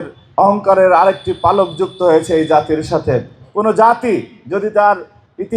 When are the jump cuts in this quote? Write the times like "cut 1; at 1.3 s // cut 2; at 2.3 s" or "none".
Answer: cut 1; at 3.4 s